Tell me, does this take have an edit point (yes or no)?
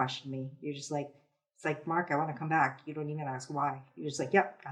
no